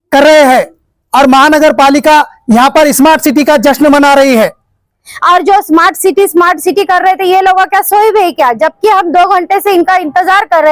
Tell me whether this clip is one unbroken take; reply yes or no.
no